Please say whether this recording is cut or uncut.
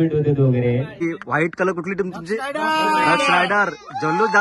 cut